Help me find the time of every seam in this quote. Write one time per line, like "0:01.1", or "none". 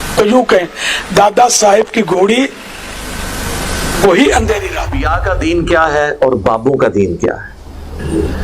0:05.1